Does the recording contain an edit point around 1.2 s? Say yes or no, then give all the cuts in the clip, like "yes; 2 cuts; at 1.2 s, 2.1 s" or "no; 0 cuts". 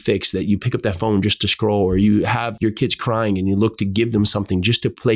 no; 1 cut; at 2.5 s